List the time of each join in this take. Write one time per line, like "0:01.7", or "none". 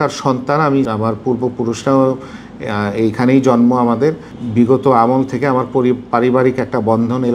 0:00.9
0:04.3